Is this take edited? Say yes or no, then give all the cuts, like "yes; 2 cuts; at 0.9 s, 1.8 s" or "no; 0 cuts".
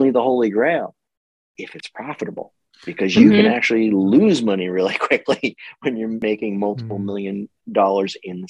yes; 1 cut; at 6.2 s